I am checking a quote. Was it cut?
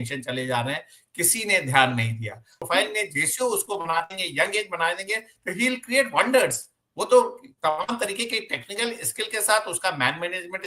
yes; 1 cut; at 2.6 s

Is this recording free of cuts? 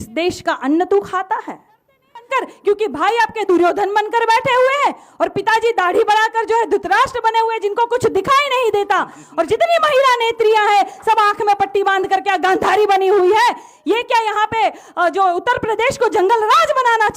no; 1 cut; at 2.3 s

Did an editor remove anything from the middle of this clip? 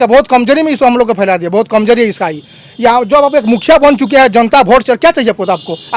no; 0 cuts

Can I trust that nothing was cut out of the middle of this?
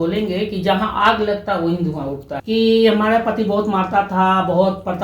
no; 1 cut; at 2.3 s

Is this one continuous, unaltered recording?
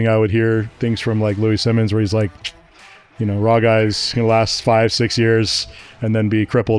yes; 0 cuts

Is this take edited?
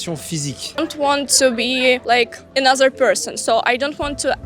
yes; 2 cuts; at 0.8 s, 2.0 s

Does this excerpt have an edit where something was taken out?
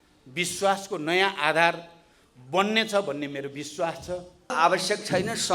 yes; 1 cut; at 4.5 s

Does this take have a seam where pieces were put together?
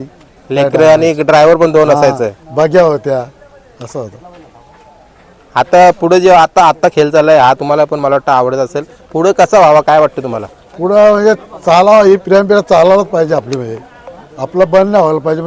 no; 0 cuts

